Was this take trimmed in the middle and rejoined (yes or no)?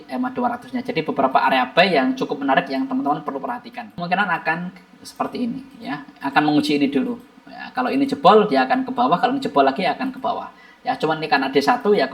yes